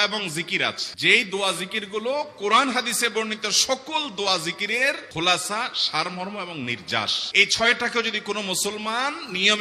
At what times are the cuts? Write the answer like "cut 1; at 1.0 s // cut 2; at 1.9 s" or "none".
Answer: none